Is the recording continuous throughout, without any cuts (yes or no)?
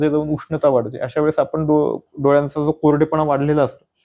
yes